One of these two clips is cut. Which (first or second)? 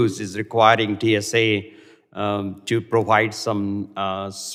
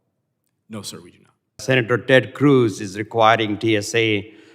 second